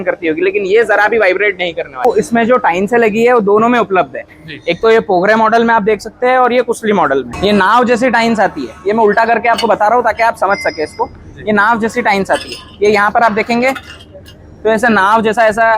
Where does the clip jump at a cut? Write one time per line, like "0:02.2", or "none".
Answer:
0:02.0
0:07.3